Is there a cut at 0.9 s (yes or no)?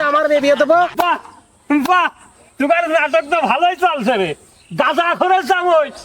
yes